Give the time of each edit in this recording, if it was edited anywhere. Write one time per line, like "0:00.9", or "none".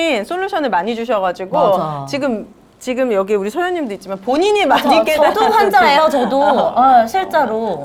none